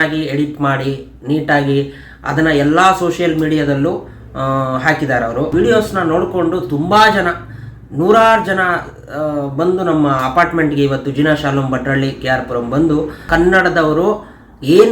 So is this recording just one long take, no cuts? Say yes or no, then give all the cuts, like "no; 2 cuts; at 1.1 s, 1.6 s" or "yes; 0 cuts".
no; 2 cuts; at 5.5 s, 13.2 s